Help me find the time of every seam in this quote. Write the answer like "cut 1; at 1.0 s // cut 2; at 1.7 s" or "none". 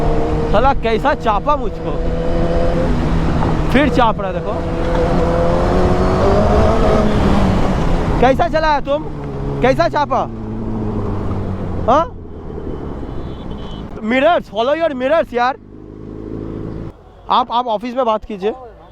cut 1; at 2.7 s // cut 2; at 13.8 s // cut 3; at 16.9 s

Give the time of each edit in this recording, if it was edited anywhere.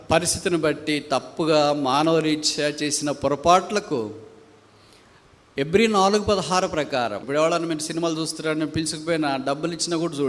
cut 1; at 7.2 s

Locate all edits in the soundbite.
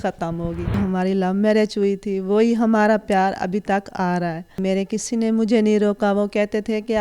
cut 1; at 0.8 s // cut 2; at 4.6 s

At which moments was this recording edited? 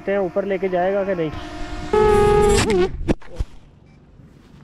cut 1; at 1.9 s

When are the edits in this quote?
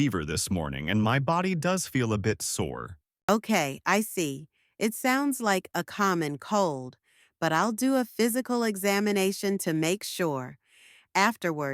cut 1; at 3.3 s

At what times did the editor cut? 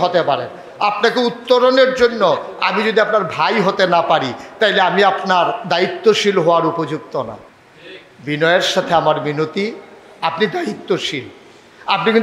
none

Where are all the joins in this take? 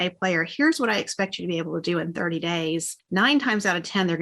cut 1; at 3.0 s

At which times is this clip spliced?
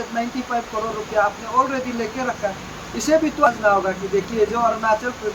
cut 1; at 3.5 s

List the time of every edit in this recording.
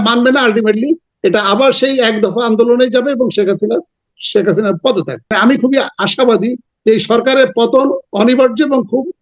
cut 1; at 5.3 s

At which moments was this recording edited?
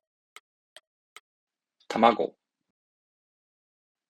none

